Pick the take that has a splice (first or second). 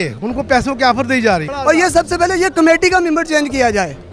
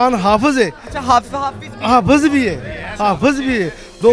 first